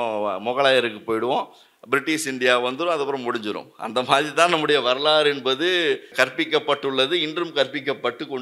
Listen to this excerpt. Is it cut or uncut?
cut